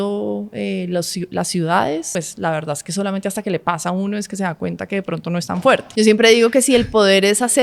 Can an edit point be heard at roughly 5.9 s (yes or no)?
yes